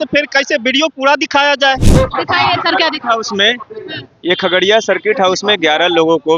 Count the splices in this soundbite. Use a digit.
1